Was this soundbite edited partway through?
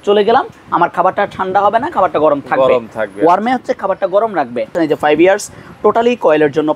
yes; 1 cut; at 4.7 s

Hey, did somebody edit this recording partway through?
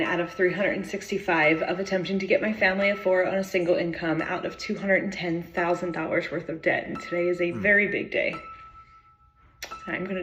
no; 0 cuts

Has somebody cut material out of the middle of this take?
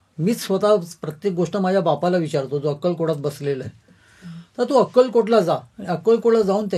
no; 0 cuts

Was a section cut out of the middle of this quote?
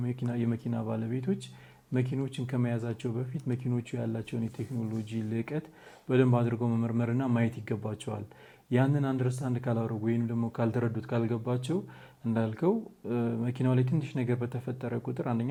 no; 0 cuts

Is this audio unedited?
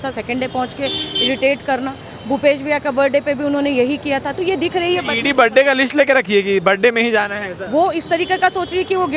yes; 0 cuts

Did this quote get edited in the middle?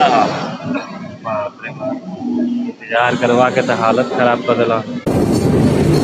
yes; 1 cut; at 5.1 s

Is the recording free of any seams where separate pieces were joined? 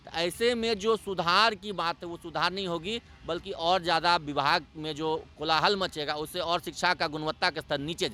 yes; 0 cuts

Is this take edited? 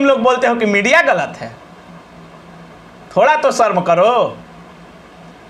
no; 0 cuts

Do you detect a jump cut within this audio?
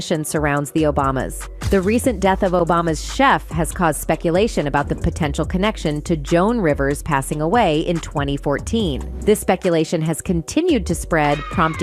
no; 0 cuts

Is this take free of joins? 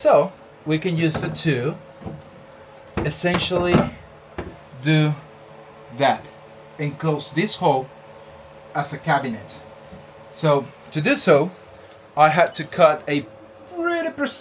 yes; 0 cuts

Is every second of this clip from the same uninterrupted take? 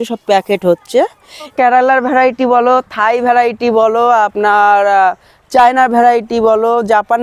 no; 1 cut; at 1.5 s

